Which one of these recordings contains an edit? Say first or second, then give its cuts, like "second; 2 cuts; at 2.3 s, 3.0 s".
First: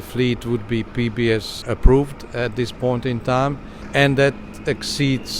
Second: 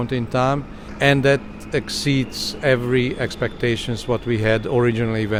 first; 1 cut; at 1.6 s